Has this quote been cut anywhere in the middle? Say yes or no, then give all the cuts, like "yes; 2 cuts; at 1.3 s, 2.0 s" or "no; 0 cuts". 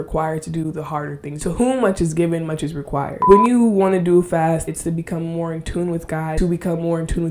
yes; 4 cuts; at 1.3 s, 3.2 s, 4.6 s, 6.4 s